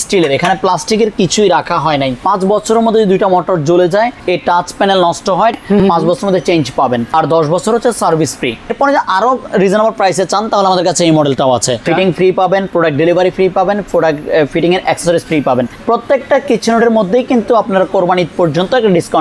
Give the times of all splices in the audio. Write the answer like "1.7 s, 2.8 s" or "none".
2.2 s, 4.2 s, 5.6 s, 7.1 s, 8.7 s, 11.8 s, 15.7 s